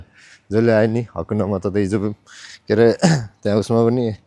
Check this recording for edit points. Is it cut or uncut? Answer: uncut